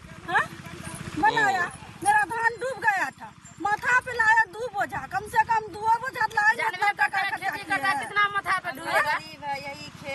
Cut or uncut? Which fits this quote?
uncut